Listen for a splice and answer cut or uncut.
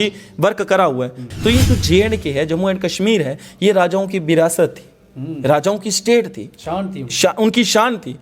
cut